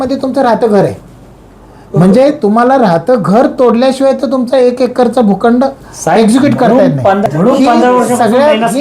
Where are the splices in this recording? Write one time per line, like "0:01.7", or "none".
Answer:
0:07.2